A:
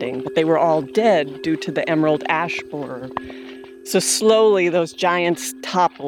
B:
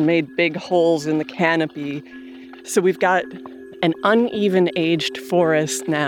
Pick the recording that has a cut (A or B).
B